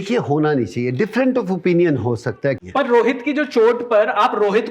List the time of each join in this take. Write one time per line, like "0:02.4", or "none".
0:02.6